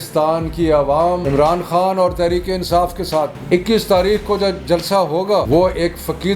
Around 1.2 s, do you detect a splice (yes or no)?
yes